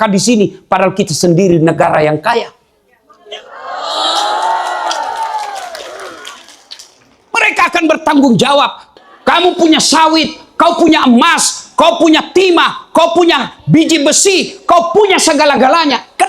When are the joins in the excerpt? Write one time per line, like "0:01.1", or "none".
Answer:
0:08.8

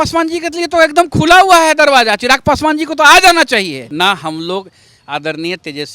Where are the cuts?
0:03.8

